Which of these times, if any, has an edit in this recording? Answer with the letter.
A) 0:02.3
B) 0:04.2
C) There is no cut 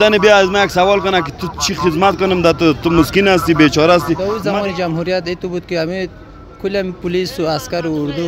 B